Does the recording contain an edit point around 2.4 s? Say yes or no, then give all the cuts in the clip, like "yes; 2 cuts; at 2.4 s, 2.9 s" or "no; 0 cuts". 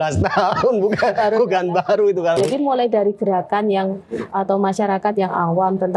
yes; 1 cut; at 2.4 s